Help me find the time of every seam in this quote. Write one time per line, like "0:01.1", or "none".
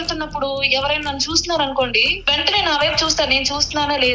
0:02.1